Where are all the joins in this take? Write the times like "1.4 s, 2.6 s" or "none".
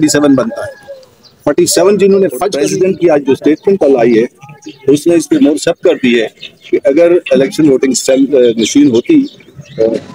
2.6 s